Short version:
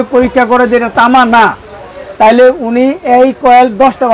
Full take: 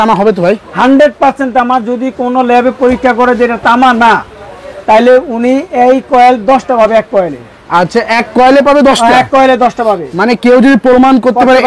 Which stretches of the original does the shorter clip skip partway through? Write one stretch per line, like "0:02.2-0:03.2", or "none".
none